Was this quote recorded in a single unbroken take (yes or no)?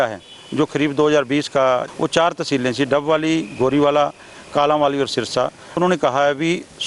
no